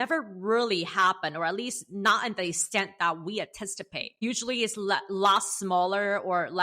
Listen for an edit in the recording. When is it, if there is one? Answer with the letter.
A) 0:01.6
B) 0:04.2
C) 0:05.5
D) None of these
B